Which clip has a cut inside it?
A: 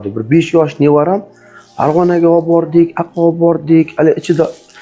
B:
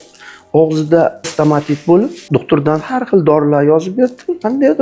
B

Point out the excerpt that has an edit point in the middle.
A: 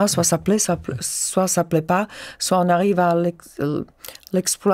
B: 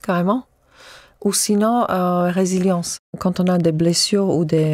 B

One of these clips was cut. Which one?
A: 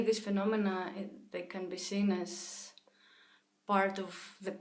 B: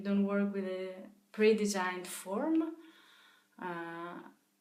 A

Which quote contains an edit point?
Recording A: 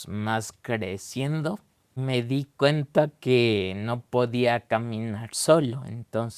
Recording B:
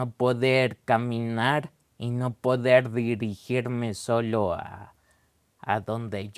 A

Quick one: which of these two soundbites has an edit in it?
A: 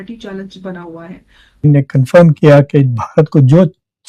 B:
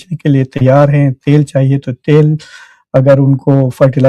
A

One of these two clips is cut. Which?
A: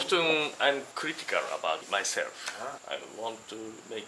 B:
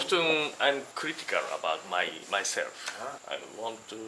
A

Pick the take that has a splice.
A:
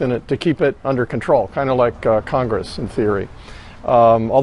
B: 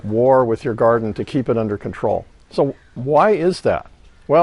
A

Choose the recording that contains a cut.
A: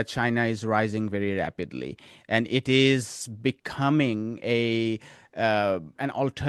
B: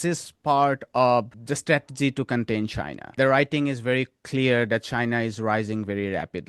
B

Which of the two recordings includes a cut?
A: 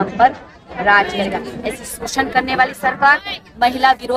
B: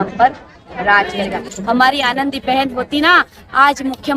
B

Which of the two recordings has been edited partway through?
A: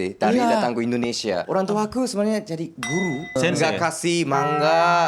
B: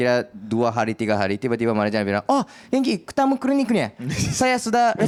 A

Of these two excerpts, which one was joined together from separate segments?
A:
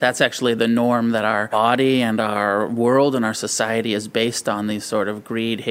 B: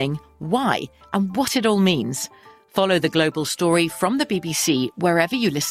A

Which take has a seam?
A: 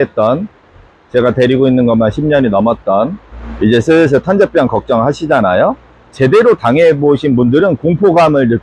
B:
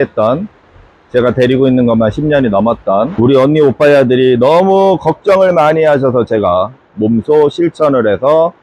B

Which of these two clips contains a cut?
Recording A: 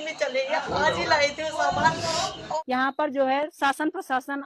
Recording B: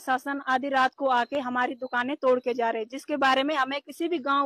A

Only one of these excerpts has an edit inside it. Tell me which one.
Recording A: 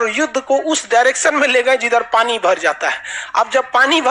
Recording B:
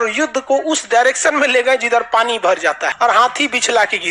B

